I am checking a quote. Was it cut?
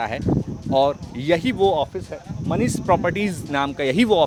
no; 0 cuts

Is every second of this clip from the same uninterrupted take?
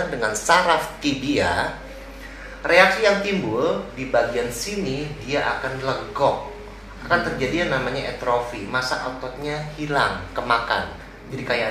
yes; 0 cuts

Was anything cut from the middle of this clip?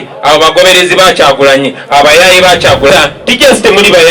yes; 1 cut; at 2.9 s

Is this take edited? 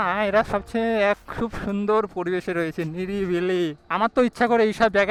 no; 0 cuts

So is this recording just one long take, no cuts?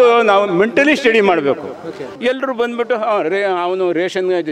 no; 1 cut; at 2.1 s

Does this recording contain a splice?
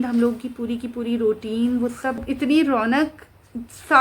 yes; 1 cut; at 2.2 s

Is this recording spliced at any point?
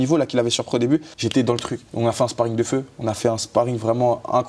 yes; 1 cut; at 1.3 s

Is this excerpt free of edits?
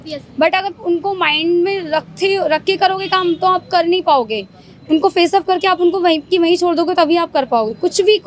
yes; 0 cuts

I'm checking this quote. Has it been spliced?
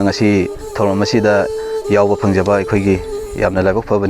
no; 0 cuts

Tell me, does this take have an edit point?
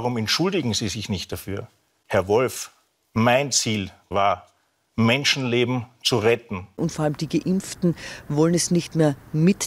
yes; 2 cuts; at 4.1 s, 6.8 s

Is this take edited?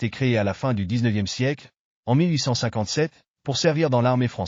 no; 0 cuts

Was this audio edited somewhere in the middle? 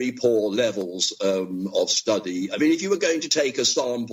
no; 0 cuts

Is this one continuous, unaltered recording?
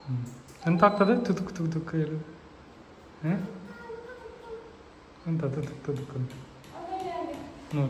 yes; 0 cuts

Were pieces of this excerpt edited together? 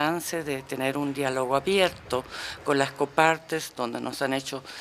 yes; 1 cut; at 2.3 s

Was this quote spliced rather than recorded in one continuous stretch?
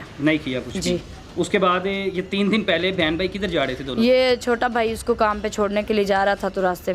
no; 0 cuts

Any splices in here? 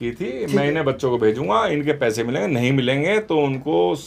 no; 0 cuts

